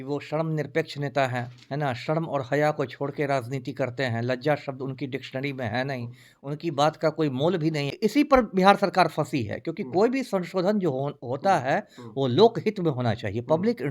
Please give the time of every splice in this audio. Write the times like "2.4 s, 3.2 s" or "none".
7.9 s